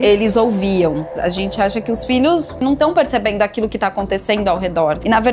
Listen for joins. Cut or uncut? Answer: cut